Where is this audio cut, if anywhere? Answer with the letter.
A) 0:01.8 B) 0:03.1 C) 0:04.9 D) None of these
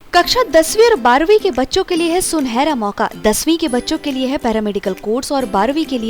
D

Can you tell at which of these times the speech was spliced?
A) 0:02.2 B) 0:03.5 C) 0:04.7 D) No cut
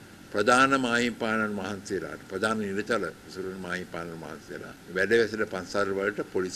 C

